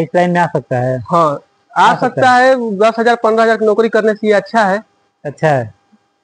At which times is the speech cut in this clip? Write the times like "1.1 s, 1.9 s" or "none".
none